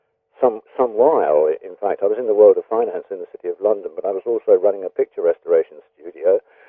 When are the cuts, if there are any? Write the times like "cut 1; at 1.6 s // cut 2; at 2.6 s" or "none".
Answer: cut 1; at 2.4 s

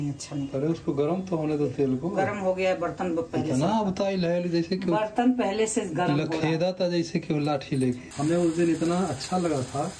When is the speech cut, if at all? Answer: cut 1; at 8.1 s

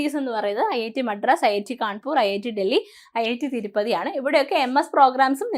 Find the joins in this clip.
none

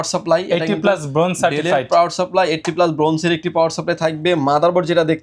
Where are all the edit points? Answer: none

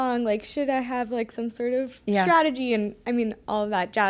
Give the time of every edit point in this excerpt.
none

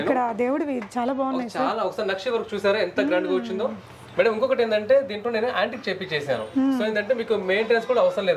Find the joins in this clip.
none

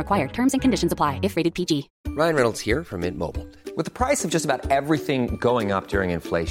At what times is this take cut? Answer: cut 1; at 2.0 s

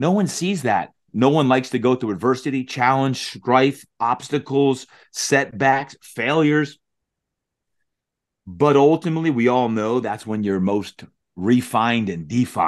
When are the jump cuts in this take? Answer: cut 1; at 1.1 s

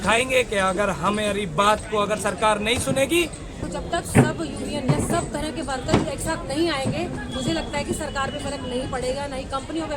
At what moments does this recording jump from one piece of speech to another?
cut 1; at 3.5 s

